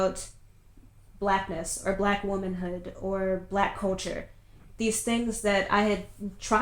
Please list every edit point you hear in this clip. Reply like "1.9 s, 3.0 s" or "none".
none